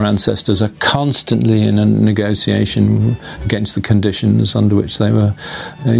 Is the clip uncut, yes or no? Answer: yes